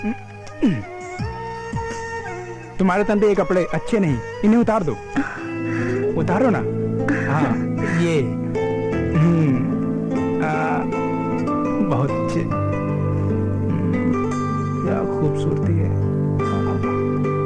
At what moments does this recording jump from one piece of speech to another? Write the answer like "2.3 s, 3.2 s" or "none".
none